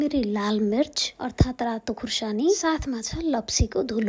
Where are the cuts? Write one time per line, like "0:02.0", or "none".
none